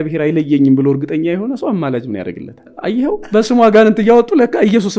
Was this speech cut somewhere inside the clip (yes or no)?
yes